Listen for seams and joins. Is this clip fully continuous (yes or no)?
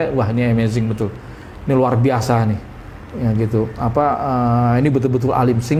yes